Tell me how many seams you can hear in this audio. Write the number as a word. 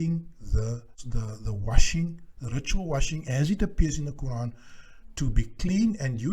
one